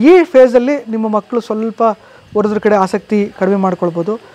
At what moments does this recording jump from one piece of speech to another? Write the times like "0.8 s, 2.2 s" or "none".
none